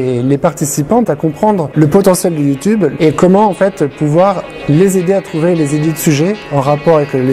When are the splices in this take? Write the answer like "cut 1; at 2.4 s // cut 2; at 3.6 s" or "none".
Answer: cut 1; at 1.1 s // cut 2; at 2.9 s